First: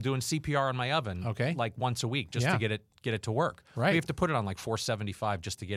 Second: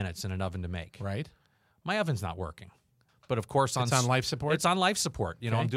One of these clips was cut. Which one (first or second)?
second